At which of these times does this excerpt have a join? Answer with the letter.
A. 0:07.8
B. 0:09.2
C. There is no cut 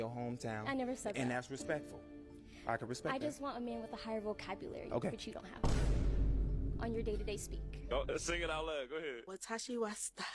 A